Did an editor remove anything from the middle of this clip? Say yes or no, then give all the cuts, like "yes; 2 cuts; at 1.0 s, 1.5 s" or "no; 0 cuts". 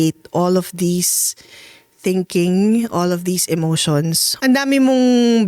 yes; 1 cut; at 4.2 s